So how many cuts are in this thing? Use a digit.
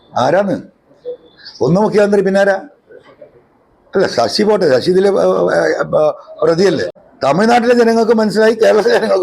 1